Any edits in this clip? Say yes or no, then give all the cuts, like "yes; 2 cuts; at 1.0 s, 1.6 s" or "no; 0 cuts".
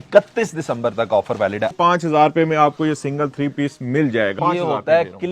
yes; 2 cuts; at 1.7 s, 4.3 s